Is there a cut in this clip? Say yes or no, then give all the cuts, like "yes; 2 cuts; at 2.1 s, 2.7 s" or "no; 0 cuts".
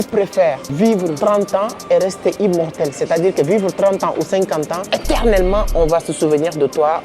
yes; 2 cuts; at 1.0 s, 4.8 s